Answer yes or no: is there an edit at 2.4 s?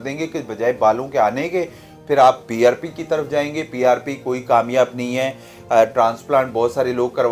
no